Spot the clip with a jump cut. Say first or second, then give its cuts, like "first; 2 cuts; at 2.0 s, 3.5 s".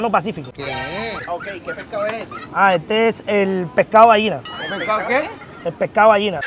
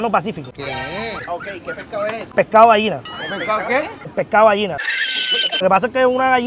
second; 3 cuts; at 2.3 s, 4.0 s, 5.6 s